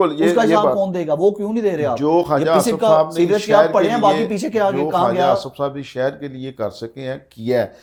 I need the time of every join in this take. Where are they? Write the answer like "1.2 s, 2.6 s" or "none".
none